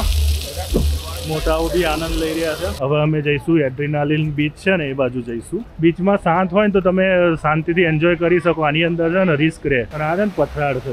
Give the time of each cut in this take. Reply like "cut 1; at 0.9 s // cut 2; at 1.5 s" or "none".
cut 1; at 2.8 s // cut 2; at 5.6 s // cut 3; at 9.9 s